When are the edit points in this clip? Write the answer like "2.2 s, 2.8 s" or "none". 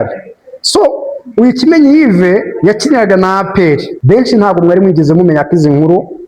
3.9 s